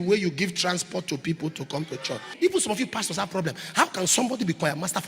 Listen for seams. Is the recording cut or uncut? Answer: cut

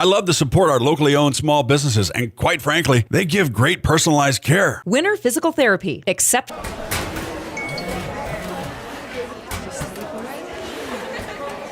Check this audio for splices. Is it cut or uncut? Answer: cut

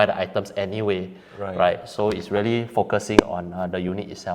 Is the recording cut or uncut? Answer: uncut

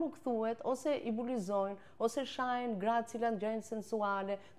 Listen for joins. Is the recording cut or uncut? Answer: uncut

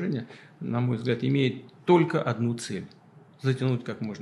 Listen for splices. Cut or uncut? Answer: uncut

